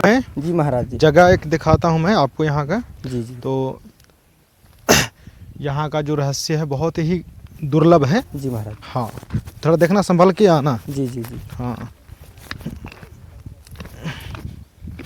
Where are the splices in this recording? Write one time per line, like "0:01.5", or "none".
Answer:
none